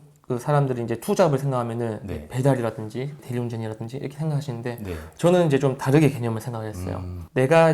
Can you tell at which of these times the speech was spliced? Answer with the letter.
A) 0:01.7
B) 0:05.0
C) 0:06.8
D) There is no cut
D